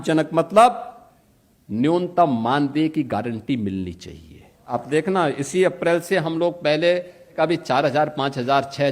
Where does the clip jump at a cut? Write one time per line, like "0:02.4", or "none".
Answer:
0:04.7
0:07.4

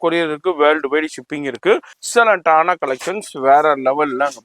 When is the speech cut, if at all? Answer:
0:02.0

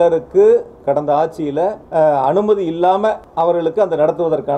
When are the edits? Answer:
0:01.8
0:03.2

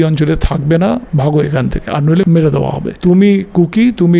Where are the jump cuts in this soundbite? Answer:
0:01.1
0:02.3

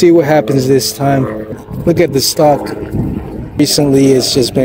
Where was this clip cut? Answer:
0:01.7
0:03.6

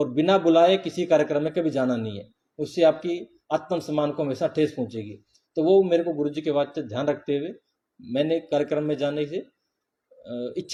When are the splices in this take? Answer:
none

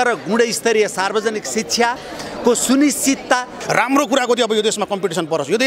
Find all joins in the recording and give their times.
0:03.5

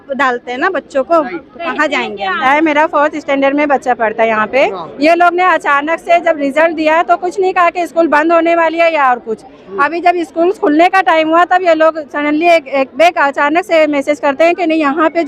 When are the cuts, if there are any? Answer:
0:02.4

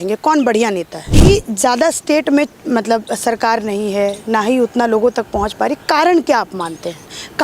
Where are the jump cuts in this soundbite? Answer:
0:01.1

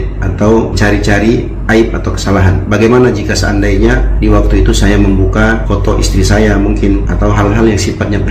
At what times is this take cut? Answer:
none

